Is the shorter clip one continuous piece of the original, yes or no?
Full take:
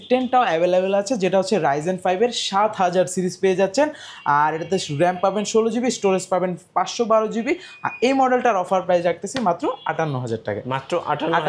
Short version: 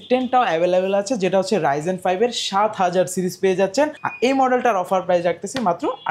no